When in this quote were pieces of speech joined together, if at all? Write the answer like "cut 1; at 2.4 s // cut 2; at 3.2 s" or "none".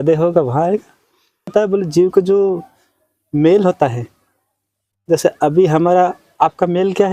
cut 1; at 1.5 s